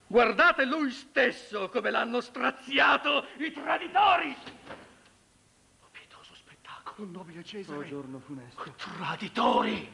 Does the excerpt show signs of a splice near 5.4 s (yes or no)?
yes